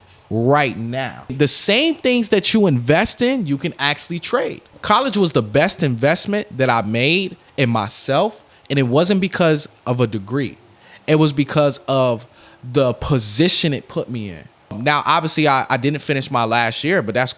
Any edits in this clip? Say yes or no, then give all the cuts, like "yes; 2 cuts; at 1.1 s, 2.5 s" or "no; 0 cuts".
yes; 3 cuts; at 1.3 s, 4.7 s, 14.8 s